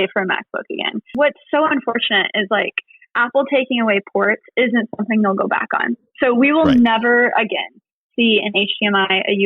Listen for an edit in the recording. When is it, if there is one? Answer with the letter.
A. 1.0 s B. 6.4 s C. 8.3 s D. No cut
A